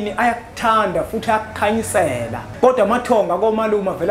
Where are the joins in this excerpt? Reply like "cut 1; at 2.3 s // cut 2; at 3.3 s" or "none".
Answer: cut 1; at 2.4 s